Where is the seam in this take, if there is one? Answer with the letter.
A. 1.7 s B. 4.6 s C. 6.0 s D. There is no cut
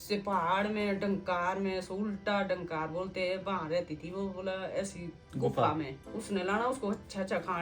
C